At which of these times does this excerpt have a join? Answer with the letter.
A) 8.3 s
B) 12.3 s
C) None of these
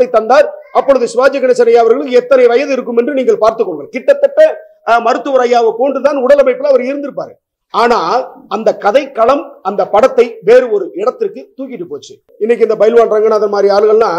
B